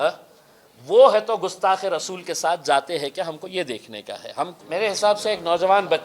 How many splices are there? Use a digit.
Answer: 1